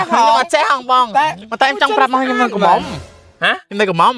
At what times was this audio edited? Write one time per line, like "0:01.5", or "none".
none